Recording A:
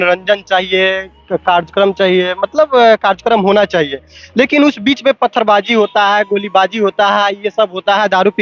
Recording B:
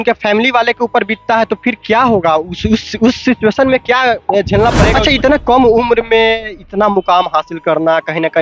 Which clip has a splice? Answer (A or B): B